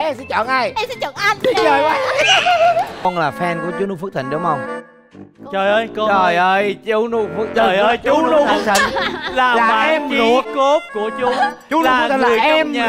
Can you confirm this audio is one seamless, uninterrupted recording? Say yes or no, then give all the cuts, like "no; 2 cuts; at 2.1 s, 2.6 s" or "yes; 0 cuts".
no; 1 cut; at 3.0 s